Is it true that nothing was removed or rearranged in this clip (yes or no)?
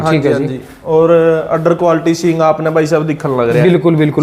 yes